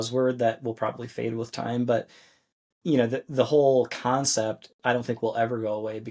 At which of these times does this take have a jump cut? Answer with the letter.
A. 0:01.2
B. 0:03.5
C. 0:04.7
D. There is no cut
D